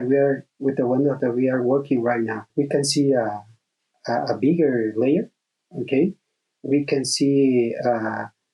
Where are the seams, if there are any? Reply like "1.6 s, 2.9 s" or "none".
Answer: 2.4 s

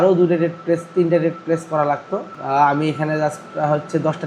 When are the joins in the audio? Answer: 2.3 s

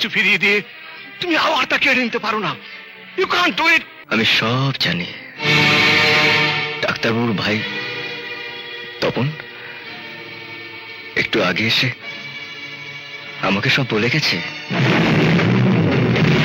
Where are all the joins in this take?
3.9 s

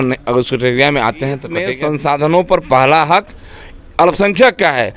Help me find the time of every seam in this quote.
1.6 s

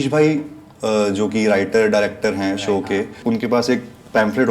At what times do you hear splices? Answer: 3.2 s

